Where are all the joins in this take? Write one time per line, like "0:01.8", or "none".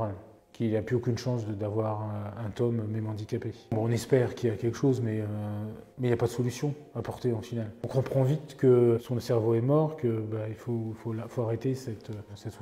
none